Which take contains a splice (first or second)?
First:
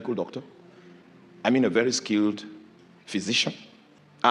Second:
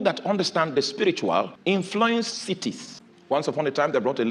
second